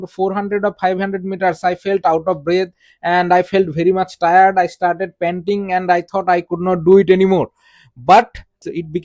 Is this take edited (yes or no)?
no